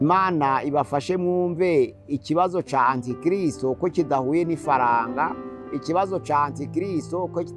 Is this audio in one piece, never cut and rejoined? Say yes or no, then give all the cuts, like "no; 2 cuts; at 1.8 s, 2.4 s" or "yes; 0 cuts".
yes; 0 cuts